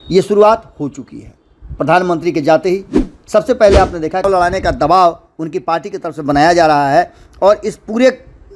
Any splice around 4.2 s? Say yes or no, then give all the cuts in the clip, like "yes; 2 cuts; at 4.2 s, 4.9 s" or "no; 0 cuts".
yes; 1 cut; at 4.2 s